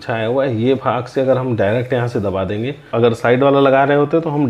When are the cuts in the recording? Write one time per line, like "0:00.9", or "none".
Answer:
0:02.9